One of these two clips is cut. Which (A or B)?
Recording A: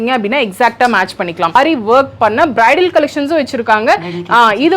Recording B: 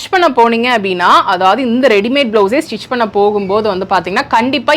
A